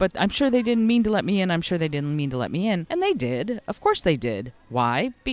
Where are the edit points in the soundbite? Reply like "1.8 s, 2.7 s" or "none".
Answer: 2.9 s